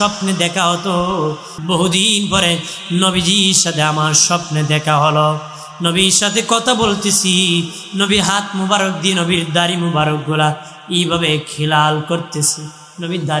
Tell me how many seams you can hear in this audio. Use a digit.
1